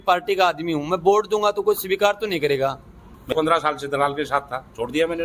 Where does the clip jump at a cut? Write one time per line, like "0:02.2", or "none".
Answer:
0:03.2